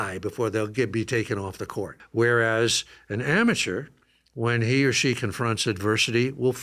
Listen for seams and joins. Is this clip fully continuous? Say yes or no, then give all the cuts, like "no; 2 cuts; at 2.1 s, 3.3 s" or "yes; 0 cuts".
no; 1 cut; at 2.0 s